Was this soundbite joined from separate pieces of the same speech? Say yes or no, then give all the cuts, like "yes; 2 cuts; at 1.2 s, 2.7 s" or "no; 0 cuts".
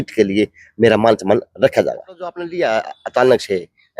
yes; 1 cut; at 2.4 s